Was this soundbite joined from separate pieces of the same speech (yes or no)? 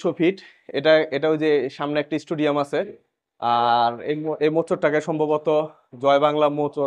no